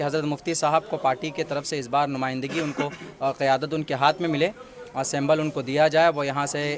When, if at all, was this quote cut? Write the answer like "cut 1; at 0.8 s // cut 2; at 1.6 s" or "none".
none